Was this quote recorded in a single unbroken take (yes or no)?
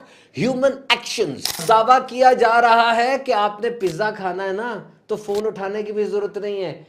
no